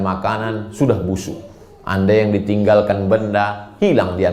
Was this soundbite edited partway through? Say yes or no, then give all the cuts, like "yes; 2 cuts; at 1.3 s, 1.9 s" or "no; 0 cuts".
no; 0 cuts